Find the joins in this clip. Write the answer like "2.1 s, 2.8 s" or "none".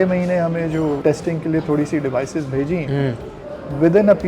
1.0 s